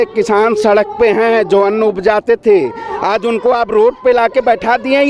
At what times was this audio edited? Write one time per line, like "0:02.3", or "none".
none